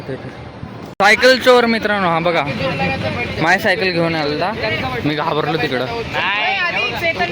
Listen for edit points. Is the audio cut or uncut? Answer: cut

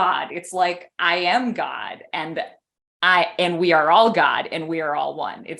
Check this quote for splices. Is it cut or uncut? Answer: uncut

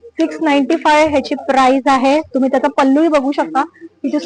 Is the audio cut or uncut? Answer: uncut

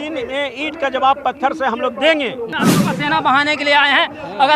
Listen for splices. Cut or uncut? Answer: cut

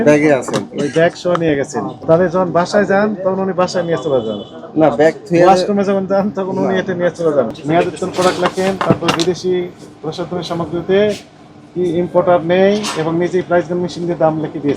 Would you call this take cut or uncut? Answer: cut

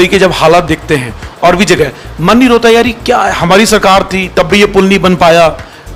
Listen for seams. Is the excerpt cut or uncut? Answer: uncut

